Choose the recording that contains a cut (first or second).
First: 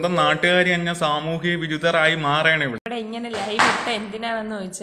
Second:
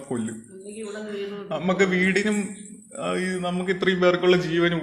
first